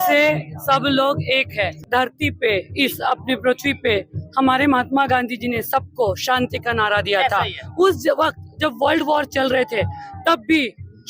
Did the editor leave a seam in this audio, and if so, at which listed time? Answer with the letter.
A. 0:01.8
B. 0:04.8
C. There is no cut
A